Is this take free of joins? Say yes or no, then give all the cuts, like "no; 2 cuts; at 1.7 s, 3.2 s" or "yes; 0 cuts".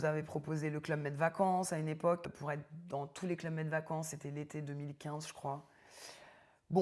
no; 1 cut; at 2.3 s